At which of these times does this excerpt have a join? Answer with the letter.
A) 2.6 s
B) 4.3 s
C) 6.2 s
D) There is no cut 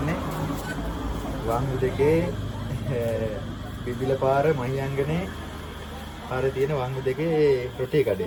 D